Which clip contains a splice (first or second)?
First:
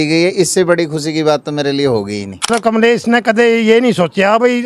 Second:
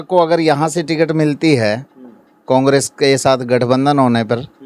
first